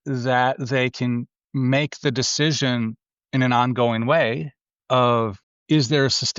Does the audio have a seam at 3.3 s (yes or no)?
no